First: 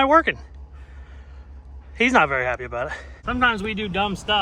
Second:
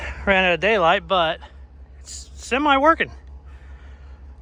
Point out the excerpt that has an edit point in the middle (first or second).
first